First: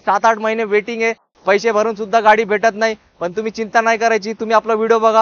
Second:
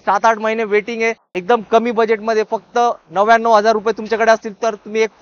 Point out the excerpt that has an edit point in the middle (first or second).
second